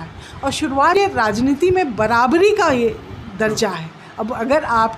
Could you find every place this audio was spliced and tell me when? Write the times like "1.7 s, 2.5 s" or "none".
0.9 s